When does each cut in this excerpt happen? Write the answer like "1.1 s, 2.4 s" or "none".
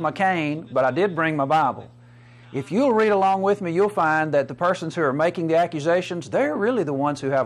none